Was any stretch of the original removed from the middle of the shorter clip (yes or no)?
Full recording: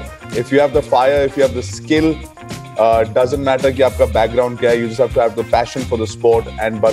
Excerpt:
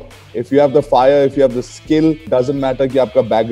yes